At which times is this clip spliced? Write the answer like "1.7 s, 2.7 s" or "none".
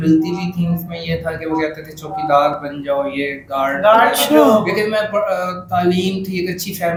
none